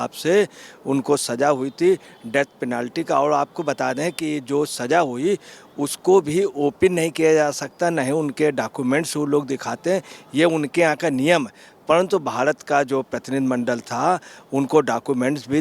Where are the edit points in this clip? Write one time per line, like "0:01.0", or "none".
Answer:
none